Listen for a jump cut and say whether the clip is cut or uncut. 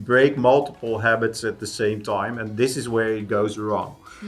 uncut